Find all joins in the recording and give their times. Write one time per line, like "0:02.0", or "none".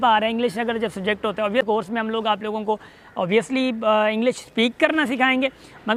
0:01.6